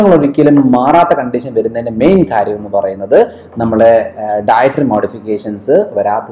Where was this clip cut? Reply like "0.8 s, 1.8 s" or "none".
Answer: none